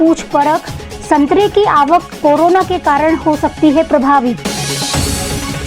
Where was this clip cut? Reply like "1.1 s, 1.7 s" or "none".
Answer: none